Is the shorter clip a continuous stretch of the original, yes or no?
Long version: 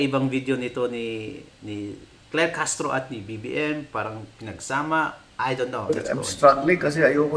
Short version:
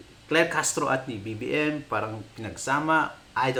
yes